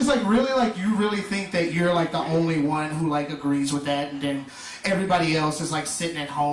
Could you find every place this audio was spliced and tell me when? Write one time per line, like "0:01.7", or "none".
0:01.5